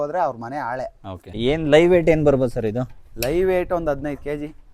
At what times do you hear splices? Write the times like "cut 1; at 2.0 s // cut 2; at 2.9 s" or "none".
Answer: cut 1; at 1.4 s